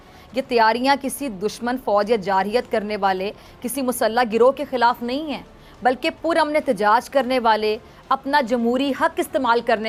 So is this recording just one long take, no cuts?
yes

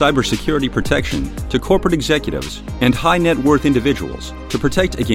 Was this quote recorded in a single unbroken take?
yes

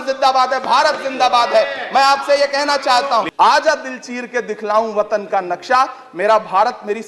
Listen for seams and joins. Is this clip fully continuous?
no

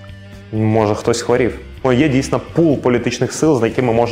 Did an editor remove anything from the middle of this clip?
yes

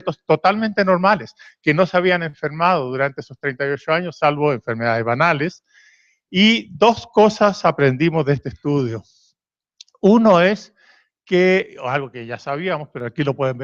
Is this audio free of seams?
no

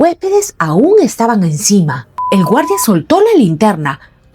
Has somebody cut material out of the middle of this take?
yes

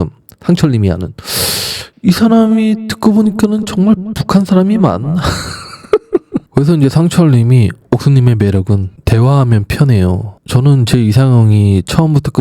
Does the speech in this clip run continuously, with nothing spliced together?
no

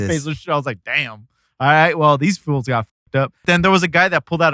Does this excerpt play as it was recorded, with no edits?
no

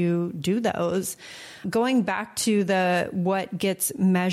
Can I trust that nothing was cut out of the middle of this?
no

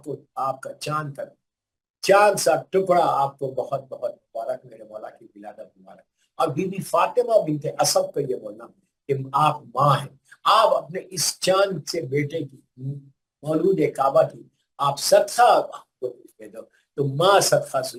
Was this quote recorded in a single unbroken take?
yes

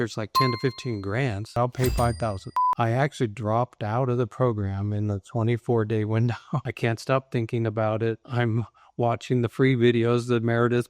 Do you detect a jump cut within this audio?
yes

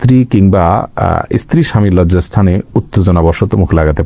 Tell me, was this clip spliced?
no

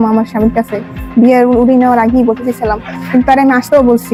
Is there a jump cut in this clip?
no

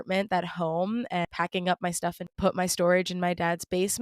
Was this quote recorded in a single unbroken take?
no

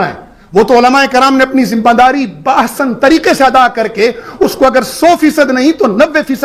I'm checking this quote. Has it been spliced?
no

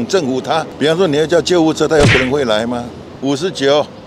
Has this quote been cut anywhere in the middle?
no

